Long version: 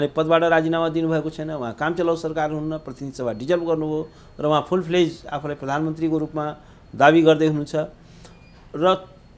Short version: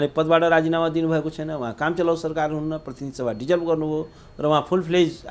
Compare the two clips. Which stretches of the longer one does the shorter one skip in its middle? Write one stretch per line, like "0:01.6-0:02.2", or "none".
none